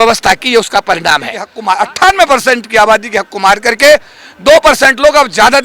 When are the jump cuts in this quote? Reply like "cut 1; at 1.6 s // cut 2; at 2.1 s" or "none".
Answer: cut 1; at 1.5 s